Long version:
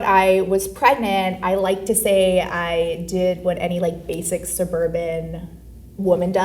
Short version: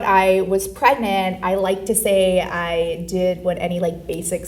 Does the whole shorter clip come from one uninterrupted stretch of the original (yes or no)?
yes